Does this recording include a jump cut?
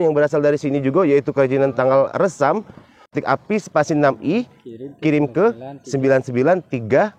yes; 1 cut; at 3.2 s

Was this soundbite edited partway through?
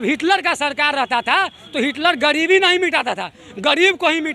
no; 0 cuts

